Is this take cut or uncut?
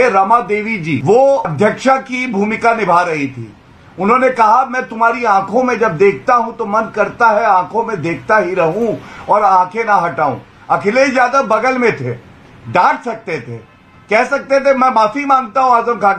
cut